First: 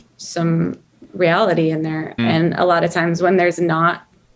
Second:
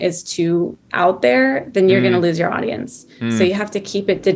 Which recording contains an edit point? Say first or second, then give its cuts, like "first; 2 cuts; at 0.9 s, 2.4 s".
first; 1 cut; at 2.1 s